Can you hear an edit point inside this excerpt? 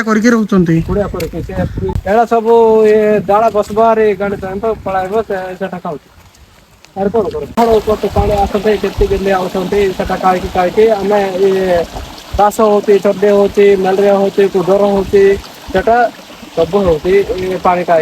yes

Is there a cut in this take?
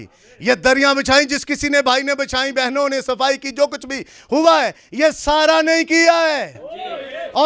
no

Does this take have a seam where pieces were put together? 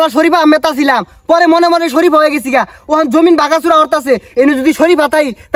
no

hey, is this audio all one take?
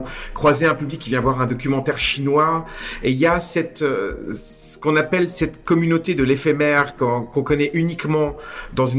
yes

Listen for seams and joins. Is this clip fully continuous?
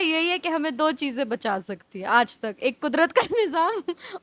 yes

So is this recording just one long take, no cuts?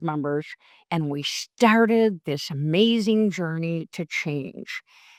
yes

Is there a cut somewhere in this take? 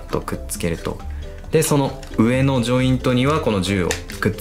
no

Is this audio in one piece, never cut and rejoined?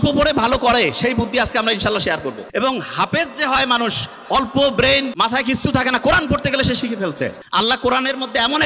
no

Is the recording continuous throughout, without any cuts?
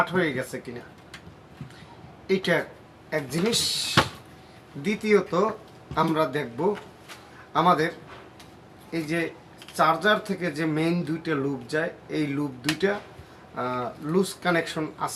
yes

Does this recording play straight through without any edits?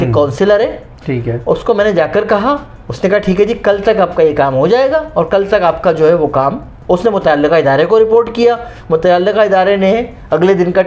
yes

